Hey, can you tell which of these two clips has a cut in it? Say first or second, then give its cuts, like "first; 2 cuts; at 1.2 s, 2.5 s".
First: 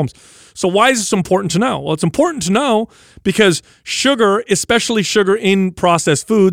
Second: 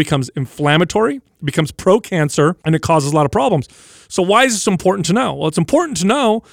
second; 1 cut; at 2.6 s